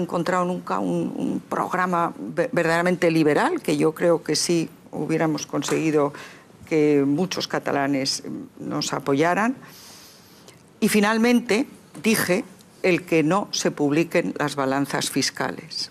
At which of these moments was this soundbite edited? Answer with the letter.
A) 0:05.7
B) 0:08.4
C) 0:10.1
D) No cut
A